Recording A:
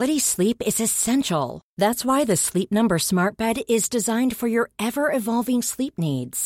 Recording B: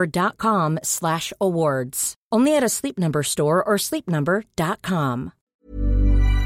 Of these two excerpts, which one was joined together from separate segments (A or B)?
B